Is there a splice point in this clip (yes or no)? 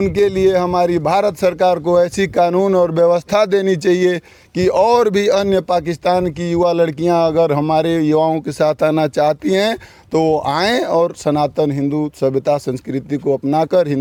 no